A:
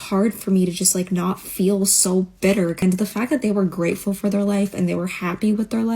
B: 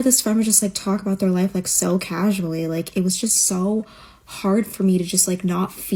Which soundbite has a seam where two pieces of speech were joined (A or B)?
A